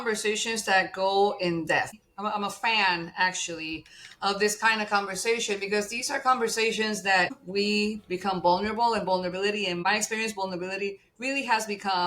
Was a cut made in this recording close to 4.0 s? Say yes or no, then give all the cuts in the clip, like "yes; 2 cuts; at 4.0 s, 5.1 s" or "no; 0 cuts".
no; 3 cuts; at 2.0 s, 7.4 s, 9.8 s